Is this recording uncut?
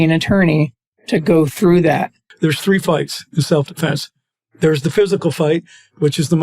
no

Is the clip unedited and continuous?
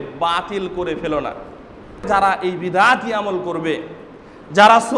no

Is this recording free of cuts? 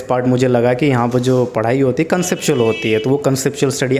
yes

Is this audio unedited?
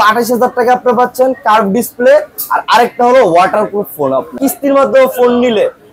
no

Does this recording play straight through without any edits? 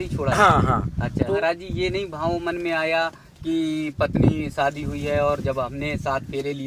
no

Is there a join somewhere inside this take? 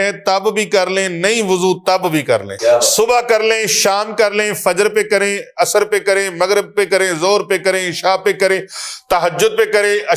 yes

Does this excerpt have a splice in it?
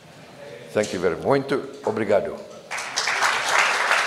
no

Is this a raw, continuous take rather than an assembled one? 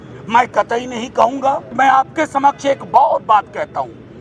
no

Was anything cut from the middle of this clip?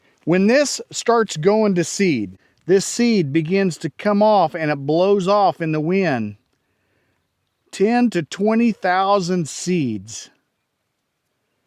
yes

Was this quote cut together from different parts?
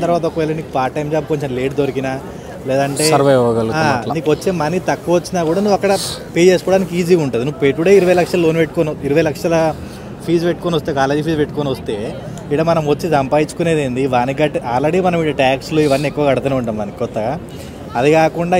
no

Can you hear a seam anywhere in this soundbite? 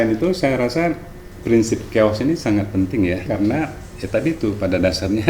yes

